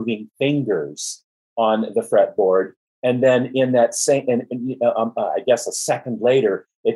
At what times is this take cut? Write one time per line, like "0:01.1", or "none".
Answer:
none